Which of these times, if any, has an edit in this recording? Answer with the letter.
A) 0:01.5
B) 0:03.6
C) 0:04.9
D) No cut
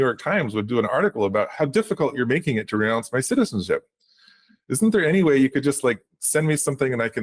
A